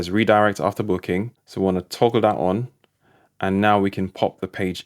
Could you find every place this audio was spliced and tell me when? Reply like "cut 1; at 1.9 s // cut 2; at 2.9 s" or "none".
cut 1; at 1.4 s

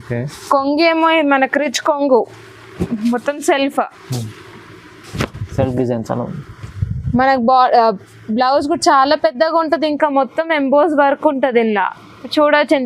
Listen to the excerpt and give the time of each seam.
none

